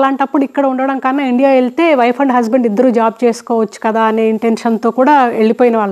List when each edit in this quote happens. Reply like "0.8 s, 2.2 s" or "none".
none